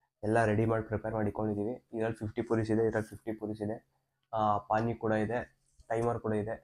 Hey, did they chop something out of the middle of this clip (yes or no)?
no